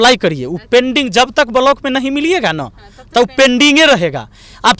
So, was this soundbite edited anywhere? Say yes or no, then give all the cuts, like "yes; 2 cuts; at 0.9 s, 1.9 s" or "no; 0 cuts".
no; 0 cuts